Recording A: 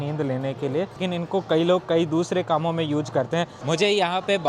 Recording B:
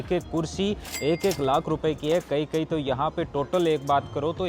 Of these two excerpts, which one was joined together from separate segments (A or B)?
A